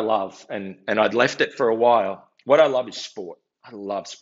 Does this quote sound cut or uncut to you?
uncut